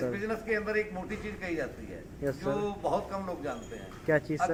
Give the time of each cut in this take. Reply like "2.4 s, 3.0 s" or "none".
none